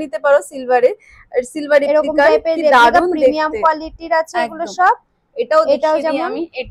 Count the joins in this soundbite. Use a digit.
0